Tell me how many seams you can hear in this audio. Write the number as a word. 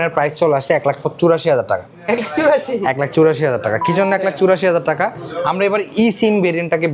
zero